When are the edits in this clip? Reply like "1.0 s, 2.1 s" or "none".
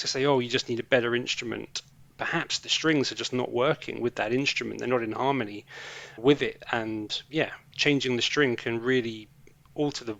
none